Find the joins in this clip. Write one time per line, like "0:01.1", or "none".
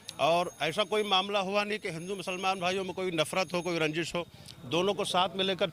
none

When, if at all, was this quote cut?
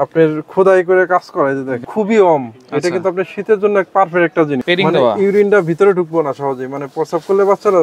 0:01.8
0:04.6

